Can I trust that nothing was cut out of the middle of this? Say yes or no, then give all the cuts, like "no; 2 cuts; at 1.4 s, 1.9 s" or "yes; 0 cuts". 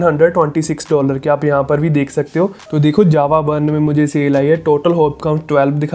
no; 1 cut; at 2.6 s